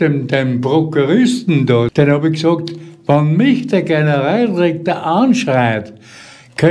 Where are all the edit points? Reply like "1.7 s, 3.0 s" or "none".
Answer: 1.9 s